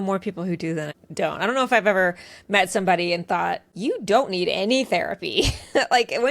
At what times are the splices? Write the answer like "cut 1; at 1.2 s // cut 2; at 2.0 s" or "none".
cut 1; at 1.0 s

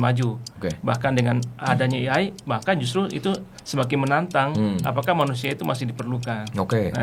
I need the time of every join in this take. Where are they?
none

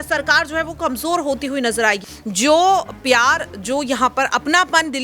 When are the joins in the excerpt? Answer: cut 1; at 2.1 s

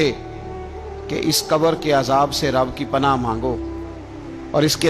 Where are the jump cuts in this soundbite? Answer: none

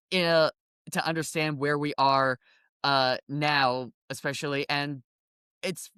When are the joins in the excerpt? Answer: none

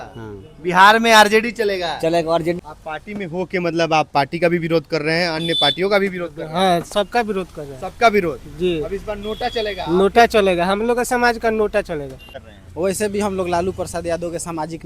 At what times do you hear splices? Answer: cut 1; at 2.6 s // cut 2; at 12.3 s

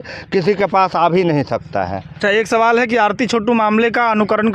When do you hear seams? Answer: none

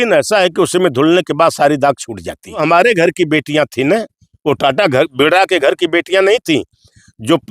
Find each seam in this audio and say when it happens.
cut 1; at 2.6 s

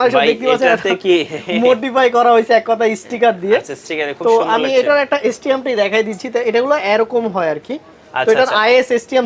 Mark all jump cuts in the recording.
none

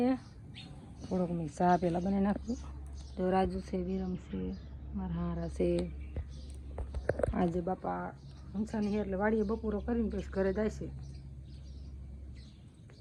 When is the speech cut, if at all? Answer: none

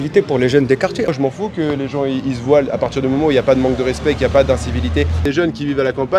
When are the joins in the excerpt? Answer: cut 1; at 1.1 s // cut 2; at 5.2 s

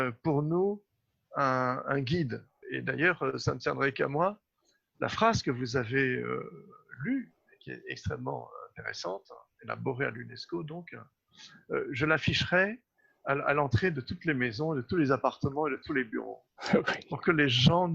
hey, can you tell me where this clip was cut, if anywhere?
cut 1; at 2.6 s

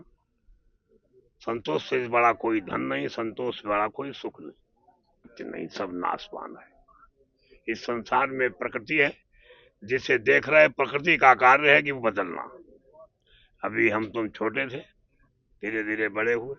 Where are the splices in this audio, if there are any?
cut 1; at 5.2 s

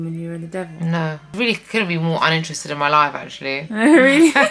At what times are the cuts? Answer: cut 1; at 1.3 s

